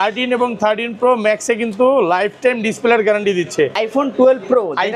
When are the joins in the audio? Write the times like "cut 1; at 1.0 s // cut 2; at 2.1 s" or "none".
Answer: cut 1; at 3.8 s